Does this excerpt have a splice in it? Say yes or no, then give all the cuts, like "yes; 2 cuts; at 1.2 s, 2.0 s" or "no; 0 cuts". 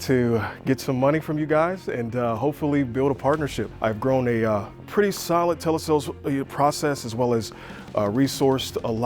yes; 1 cut; at 3.7 s